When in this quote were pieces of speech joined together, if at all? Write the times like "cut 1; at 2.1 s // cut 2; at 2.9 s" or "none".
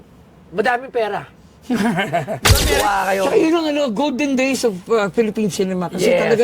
cut 1; at 2.7 s